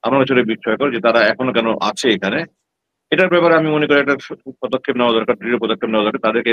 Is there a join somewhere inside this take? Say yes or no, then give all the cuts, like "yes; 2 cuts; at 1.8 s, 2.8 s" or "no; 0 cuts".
no; 0 cuts